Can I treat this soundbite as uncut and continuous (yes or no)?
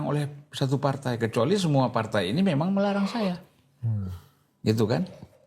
yes